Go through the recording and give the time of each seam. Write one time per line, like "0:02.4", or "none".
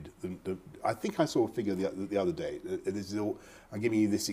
0:01.5

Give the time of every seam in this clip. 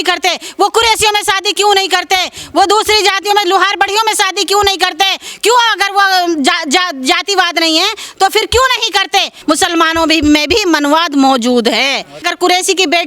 0:09.3
0:12.3

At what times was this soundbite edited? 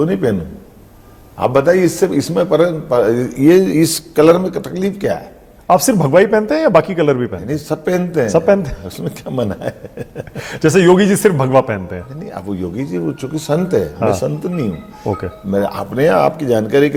none

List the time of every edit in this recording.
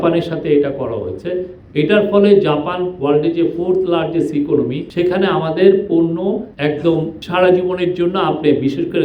0:04.8
0:06.5
0:07.2

